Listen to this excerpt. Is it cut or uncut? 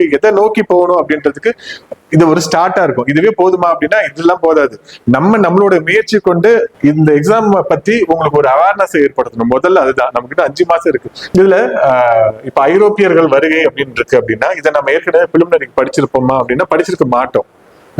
cut